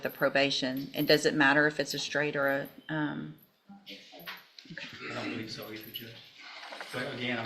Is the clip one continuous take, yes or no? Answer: yes